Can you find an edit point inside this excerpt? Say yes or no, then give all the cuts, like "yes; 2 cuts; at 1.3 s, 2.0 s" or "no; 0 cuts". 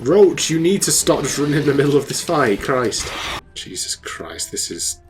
yes; 1 cut; at 3.5 s